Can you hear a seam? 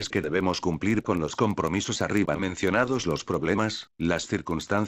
yes; 1 cut; at 3.2 s

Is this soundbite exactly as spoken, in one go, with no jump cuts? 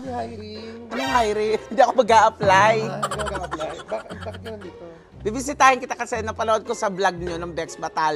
yes; 0 cuts

